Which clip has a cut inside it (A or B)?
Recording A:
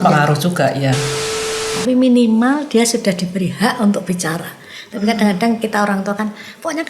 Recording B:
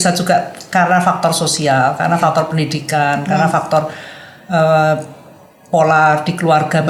A